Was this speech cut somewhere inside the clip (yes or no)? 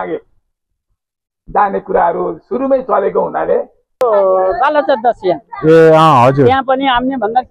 yes